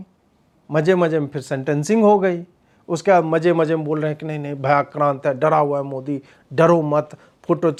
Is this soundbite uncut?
yes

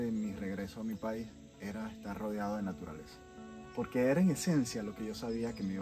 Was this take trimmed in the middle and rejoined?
no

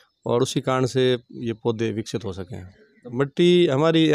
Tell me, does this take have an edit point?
yes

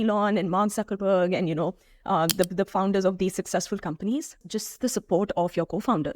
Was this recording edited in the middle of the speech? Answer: yes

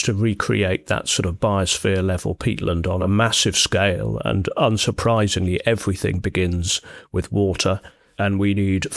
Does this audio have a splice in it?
yes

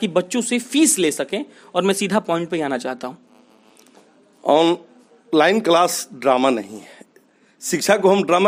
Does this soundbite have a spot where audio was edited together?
no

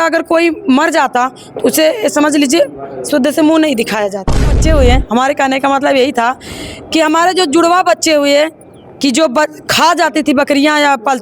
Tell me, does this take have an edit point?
yes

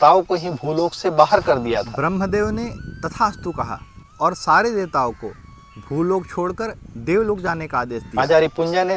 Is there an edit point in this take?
no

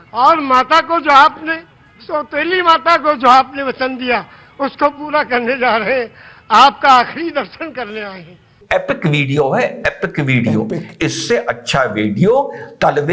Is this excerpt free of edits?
no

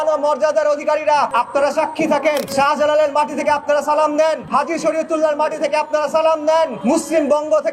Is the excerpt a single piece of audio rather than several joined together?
no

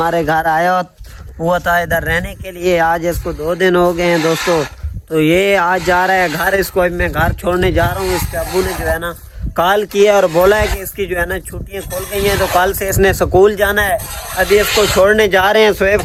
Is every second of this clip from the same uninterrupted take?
yes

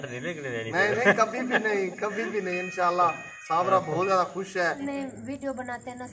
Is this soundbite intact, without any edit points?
no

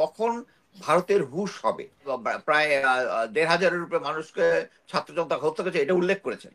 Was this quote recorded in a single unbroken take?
no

